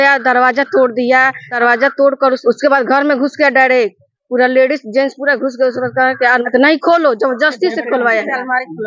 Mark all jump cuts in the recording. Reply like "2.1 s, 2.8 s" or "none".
1.5 s, 2.4 s, 6.4 s